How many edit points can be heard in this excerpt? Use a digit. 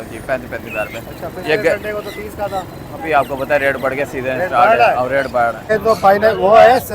1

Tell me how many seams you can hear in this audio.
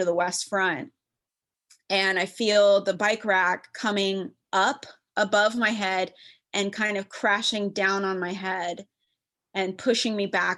0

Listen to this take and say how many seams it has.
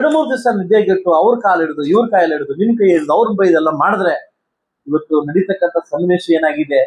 0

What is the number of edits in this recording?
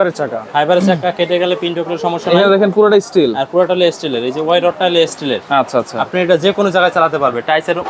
0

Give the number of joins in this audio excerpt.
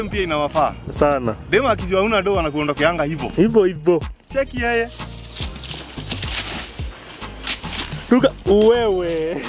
0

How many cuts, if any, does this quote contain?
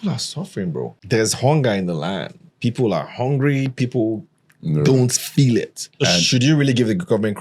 2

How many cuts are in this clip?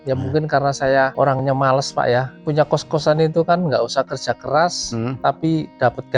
0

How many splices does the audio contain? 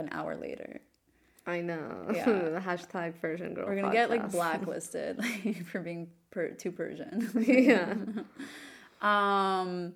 0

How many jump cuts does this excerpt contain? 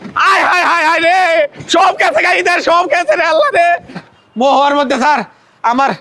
1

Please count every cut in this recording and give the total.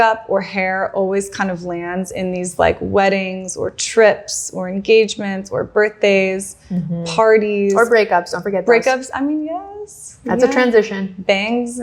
0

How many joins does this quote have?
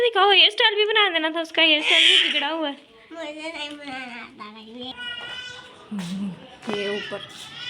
1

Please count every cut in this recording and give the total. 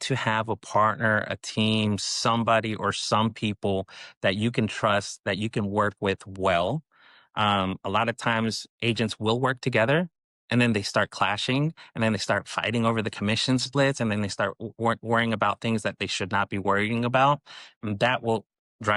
0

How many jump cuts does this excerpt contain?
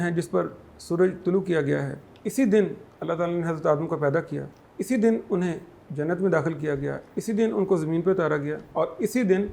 1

